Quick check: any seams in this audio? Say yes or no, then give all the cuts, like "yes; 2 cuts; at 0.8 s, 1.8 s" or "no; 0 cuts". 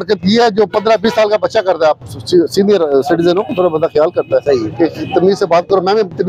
no; 0 cuts